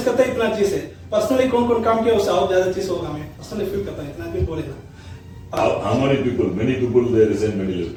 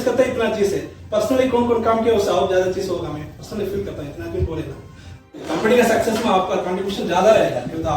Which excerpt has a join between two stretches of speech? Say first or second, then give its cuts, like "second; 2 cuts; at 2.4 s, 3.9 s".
second; 1 cut; at 5.5 s